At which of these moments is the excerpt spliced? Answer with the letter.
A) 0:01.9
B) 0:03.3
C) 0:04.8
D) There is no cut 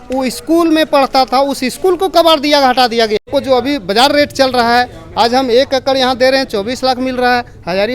B